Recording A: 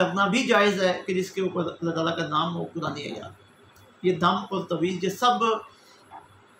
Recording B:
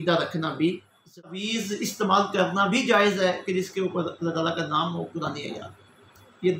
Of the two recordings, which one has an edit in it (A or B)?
B